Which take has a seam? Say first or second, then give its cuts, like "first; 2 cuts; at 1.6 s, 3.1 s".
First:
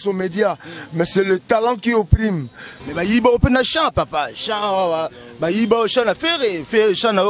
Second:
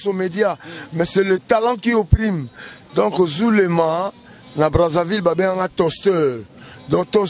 first; 1 cut; at 2.7 s